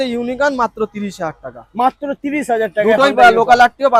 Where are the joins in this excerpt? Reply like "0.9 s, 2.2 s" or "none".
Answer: none